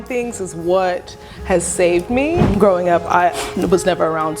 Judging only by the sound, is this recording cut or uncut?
cut